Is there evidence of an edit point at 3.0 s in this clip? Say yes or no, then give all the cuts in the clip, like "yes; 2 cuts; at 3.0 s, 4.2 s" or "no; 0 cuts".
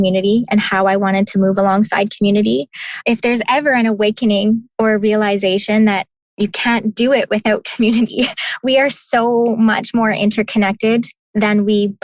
yes; 1 cut; at 3.0 s